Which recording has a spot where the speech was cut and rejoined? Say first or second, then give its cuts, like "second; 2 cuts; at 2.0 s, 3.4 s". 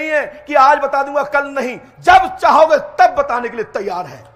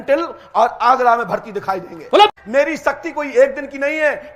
second; 1 cut; at 2.3 s